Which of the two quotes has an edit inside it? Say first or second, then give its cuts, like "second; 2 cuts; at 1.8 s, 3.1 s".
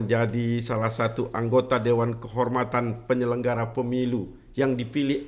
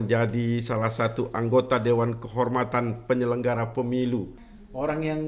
second; 1 cut; at 4.4 s